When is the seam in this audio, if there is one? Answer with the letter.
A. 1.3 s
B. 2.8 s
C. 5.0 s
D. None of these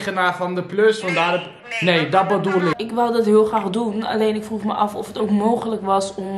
B